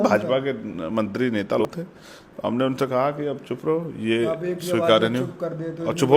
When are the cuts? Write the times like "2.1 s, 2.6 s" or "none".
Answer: 1.6 s